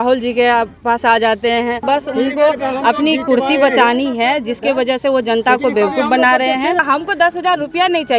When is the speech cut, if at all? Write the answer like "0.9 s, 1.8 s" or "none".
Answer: 1.8 s, 6.8 s